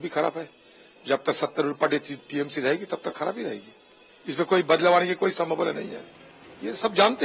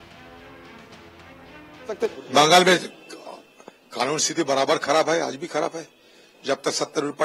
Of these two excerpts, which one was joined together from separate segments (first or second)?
second